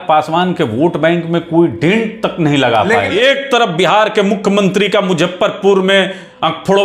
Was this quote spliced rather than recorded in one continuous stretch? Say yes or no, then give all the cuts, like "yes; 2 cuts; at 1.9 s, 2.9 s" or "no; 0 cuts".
yes; 1 cut; at 3.1 s